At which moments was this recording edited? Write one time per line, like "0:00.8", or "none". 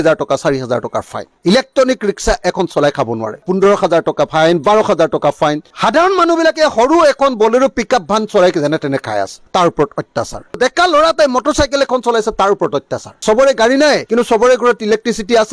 0:01.3
0:05.6
0:13.1